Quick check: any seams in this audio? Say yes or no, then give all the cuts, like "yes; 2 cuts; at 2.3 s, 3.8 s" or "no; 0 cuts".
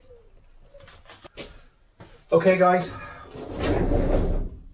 yes; 1 cut; at 1.3 s